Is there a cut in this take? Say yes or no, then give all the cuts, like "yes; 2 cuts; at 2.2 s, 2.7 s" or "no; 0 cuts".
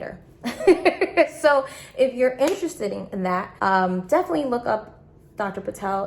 yes; 1 cut; at 3.5 s